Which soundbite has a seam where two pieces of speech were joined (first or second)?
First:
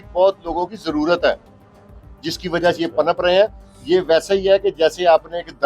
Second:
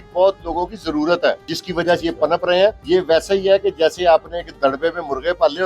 second